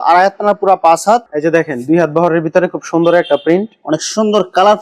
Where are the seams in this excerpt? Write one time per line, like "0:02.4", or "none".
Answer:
0:01.3